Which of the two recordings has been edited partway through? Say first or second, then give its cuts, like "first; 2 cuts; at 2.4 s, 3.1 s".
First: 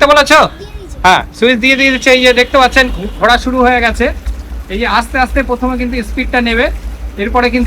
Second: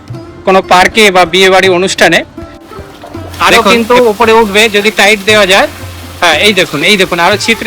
second; 1 cut; at 2.7 s